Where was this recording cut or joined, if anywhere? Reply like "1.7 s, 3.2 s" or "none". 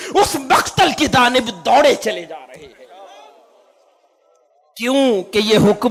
none

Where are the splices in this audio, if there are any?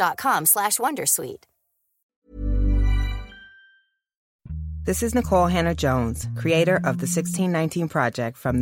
4.1 s

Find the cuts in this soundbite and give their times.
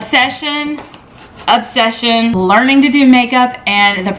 2.3 s

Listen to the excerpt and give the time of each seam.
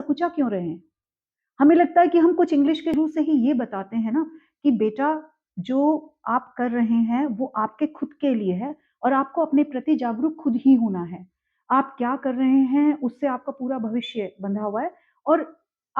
2.9 s

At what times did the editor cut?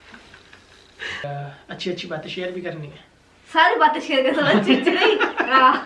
1.2 s

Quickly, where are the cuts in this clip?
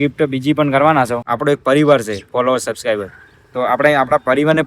1.2 s

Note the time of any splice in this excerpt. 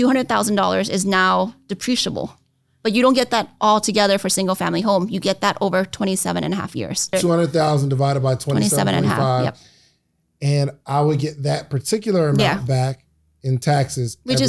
7.1 s

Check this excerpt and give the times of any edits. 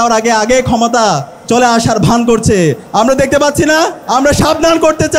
1.3 s, 2.8 s, 4.0 s

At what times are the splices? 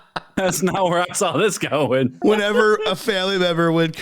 2.2 s

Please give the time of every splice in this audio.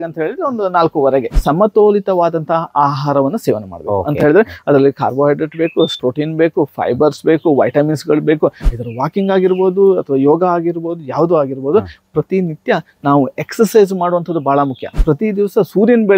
1.3 s, 8.6 s, 14.9 s

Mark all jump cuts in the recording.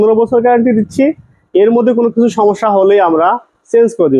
none

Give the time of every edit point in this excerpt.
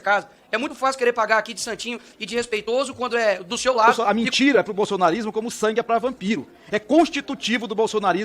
4.0 s

